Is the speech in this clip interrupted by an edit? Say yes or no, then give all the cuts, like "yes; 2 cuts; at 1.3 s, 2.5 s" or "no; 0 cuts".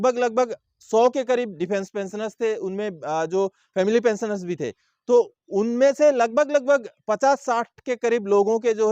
no; 0 cuts